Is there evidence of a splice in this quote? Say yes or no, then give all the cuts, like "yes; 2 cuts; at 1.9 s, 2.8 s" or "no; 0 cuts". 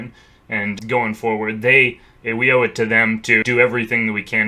yes; 2 cuts; at 0.8 s, 3.4 s